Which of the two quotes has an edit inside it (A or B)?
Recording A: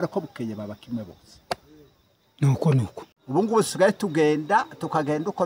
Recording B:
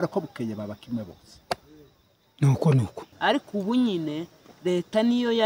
B